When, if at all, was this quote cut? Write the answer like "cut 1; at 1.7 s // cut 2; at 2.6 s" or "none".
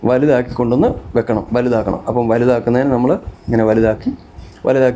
none